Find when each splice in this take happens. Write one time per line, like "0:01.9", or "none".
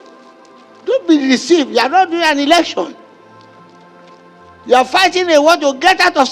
none

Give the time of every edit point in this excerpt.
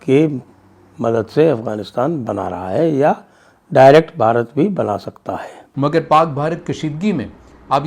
0:05.6

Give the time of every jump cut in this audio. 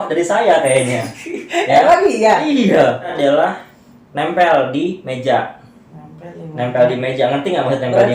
0:03.1

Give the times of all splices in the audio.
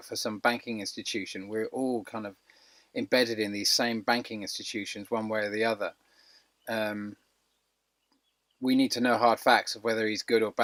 none

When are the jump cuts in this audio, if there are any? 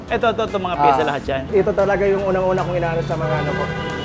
0:01.5

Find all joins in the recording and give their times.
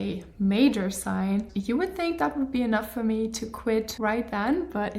0:01.5
0:03.9

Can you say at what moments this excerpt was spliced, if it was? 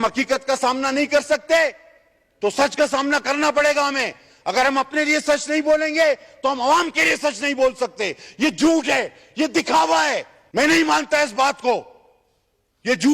0:10.4

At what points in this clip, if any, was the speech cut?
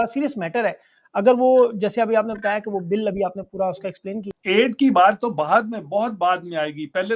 0:04.3

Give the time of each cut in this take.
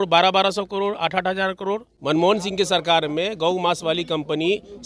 0:01.9

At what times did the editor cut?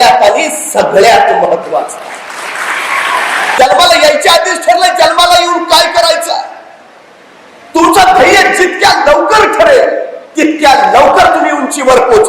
0:03.4

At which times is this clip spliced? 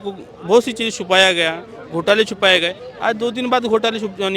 none

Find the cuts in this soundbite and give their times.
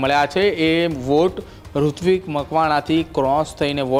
none

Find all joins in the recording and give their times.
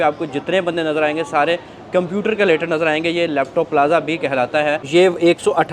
0:04.8

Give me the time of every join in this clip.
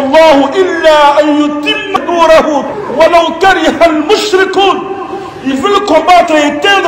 0:02.0
0:02.8

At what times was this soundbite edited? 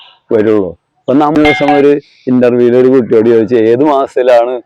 0:01.4

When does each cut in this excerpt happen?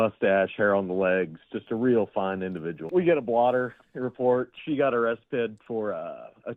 0:02.8

